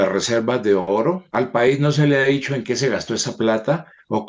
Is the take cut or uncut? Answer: cut